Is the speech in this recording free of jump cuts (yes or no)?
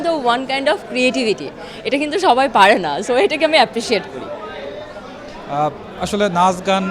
yes